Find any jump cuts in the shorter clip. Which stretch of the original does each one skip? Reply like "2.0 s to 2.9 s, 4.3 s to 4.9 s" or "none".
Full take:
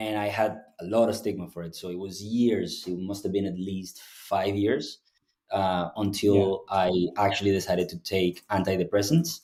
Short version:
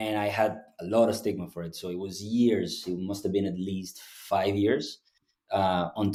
none